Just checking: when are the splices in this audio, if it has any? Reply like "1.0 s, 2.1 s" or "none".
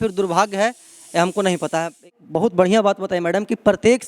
2.2 s